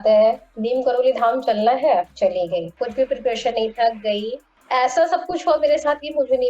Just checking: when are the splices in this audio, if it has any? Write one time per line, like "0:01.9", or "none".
0:02.3

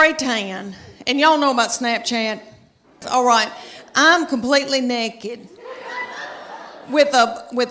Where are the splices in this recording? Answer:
0:03.0

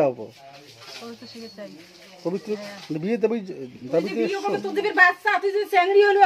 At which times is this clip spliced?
0:02.6

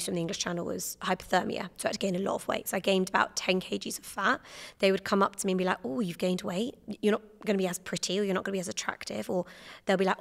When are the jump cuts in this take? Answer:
0:06.8

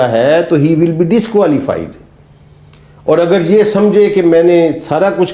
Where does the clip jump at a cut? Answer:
none

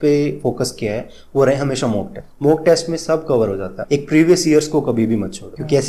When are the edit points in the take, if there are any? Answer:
none

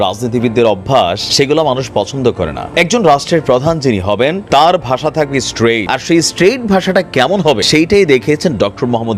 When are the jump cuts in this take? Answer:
0:01.2
0:02.6
0:04.4
0:05.8
0:07.6

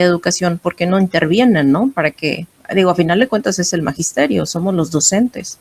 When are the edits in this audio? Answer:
none

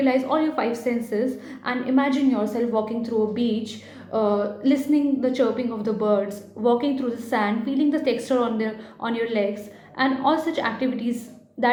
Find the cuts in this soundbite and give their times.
none

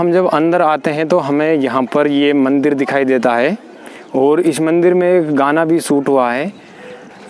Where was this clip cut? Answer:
none

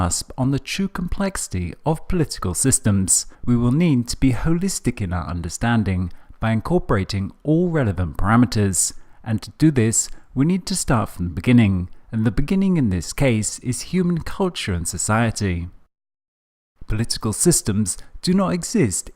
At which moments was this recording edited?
0:16.3

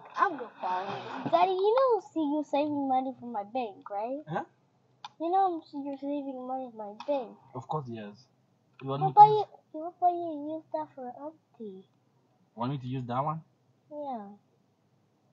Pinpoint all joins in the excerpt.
0:01.1

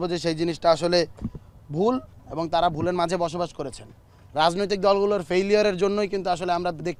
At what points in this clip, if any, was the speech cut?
none

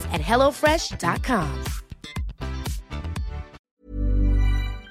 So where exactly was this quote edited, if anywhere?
0:03.6

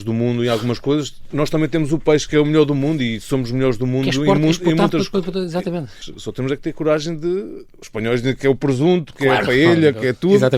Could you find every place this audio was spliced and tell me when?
0:01.3
0:06.0

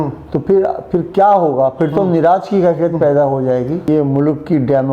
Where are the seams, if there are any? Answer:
0:03.9

